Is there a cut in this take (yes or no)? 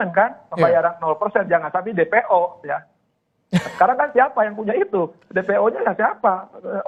no